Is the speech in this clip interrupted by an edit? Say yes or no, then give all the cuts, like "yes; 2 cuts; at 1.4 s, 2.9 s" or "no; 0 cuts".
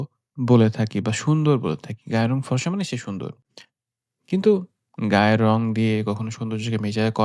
no; 0 cuts